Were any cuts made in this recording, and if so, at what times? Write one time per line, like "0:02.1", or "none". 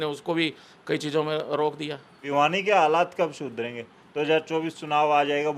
0:02.1